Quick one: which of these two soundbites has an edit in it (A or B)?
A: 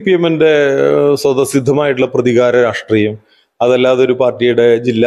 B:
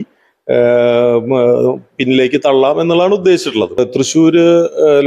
B